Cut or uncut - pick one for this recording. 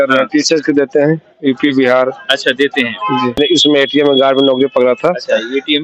cut